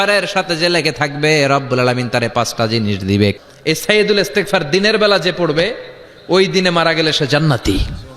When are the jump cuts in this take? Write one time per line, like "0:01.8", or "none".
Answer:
0:03.3